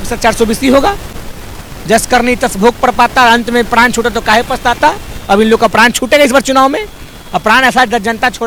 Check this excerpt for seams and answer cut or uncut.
uncut